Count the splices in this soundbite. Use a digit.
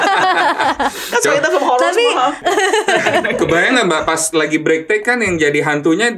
1